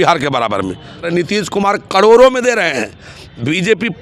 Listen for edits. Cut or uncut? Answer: cut